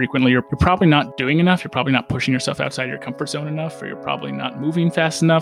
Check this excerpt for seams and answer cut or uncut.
cut